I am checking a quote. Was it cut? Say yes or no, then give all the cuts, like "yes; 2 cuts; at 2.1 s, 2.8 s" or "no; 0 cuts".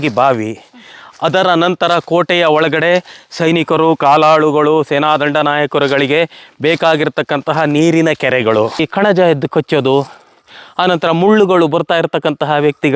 yes; 1 cut; at 8.9 s